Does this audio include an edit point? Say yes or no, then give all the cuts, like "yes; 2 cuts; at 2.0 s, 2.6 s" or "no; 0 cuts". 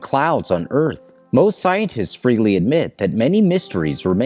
yes; 1 cut; at 3.1 s